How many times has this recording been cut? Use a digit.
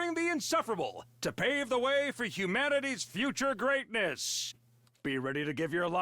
1